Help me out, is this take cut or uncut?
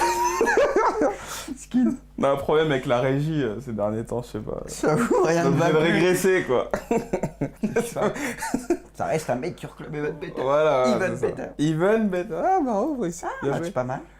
uncut